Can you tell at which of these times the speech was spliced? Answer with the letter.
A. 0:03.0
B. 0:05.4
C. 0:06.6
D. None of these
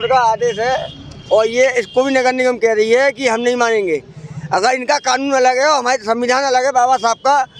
D